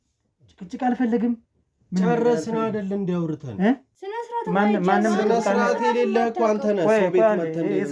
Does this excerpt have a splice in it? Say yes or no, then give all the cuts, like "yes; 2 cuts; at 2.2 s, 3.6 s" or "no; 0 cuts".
yes; 1 cut; at 3.9 s